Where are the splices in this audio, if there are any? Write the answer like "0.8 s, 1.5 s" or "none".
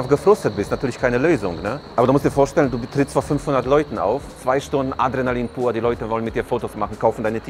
none